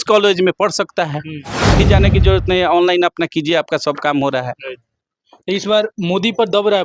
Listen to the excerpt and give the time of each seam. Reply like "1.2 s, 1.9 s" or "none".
1.8 s